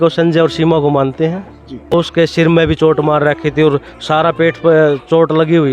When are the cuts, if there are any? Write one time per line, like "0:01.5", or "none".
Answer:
0:01.9